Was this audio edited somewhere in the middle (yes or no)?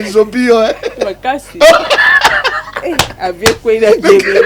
no